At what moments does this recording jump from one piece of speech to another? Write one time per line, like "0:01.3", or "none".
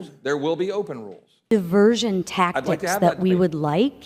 0:01.5